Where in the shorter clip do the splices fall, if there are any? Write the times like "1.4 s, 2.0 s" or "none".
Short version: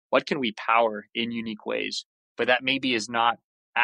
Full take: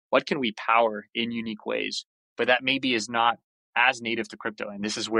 none